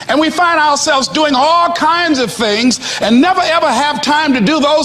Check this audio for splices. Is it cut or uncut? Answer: uncut